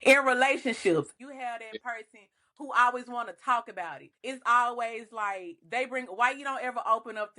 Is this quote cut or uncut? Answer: cut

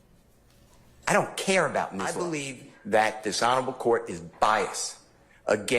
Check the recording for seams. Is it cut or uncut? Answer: cut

